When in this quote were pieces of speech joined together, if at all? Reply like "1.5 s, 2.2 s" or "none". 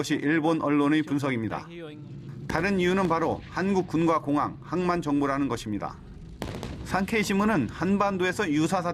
none